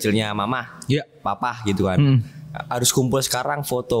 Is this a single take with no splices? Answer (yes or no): yes